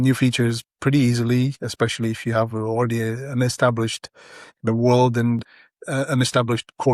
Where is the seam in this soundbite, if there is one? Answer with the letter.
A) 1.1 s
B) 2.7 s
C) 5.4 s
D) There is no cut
C